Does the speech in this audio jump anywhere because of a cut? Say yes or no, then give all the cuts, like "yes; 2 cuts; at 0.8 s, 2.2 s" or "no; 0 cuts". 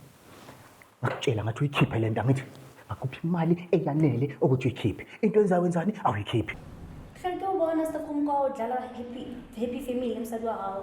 yes; 1 cut; at 6.6 s